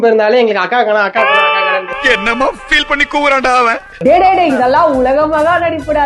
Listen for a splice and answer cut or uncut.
uncut